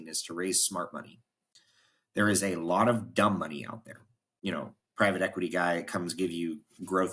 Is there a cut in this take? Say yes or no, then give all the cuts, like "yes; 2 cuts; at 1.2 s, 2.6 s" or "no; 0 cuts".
no; 0 cuts